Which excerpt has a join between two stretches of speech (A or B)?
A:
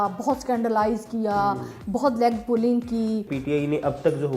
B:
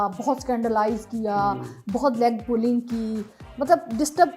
A